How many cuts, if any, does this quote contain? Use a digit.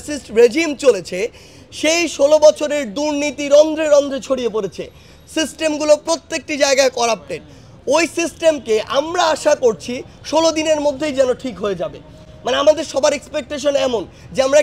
0